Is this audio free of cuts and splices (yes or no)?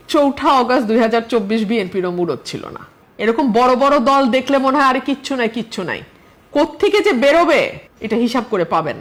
yes